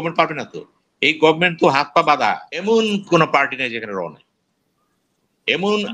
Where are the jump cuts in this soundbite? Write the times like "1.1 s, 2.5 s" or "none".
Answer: 2.5 s